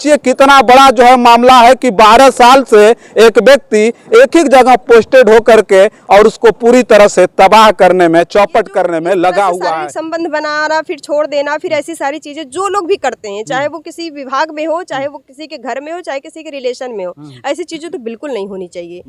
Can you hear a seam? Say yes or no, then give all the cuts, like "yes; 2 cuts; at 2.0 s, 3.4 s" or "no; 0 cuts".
yes; 1 cut; at 9.7 s